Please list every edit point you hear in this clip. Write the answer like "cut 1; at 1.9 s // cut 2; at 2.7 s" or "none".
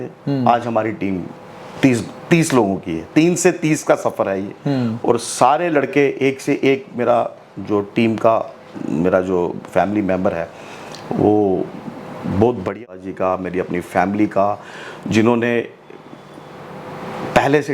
cut 1; at 12.9 s